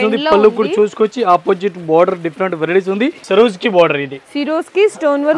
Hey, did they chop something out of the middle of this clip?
yes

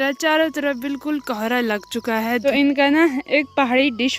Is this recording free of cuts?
no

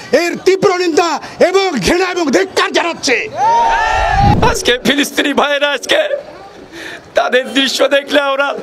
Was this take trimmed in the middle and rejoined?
yes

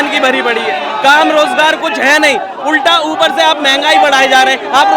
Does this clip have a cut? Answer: no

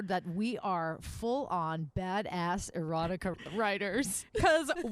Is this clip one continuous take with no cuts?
no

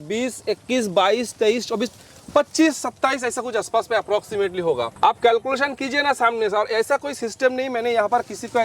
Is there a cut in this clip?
no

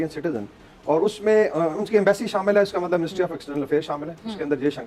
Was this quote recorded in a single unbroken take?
yes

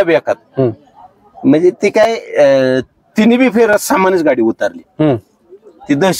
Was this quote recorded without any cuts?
yes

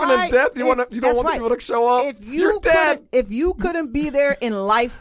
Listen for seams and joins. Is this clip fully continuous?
yes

